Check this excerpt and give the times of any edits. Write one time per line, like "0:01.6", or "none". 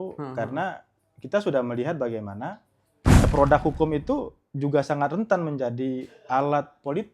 0:03.2